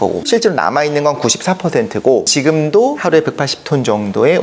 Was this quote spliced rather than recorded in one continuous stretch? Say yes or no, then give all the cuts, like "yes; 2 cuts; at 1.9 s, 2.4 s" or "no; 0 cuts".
yes; 1 cut; at 2.3 s